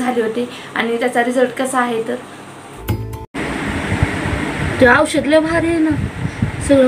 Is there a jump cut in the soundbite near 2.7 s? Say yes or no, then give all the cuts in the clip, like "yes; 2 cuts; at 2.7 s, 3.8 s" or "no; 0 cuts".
yes; 1 cut; at 2.7 s